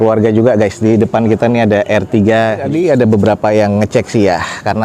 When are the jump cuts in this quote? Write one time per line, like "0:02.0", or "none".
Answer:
0:02.7